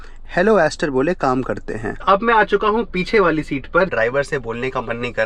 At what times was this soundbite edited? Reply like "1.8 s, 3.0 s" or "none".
2.0 s, 3.9 s